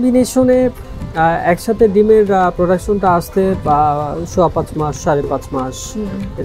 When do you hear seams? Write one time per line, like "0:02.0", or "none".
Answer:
none